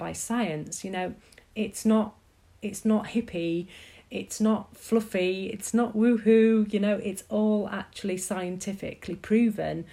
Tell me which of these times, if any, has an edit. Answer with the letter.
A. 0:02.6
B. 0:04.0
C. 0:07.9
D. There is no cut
D